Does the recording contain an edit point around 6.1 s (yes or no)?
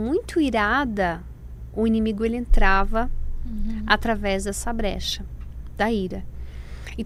no